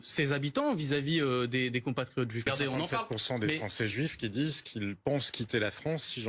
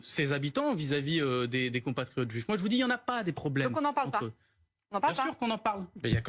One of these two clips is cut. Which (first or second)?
first